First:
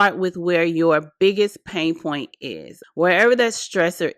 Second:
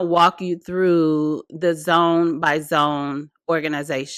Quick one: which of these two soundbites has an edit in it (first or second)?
first